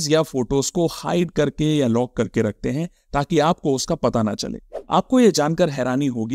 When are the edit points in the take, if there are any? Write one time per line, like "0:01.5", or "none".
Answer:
0:04.6